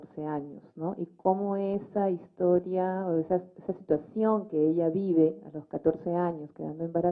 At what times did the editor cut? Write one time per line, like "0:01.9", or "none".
0:01.1